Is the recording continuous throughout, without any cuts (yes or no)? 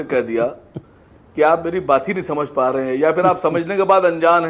yes